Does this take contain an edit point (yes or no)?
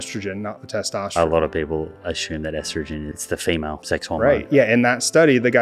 yes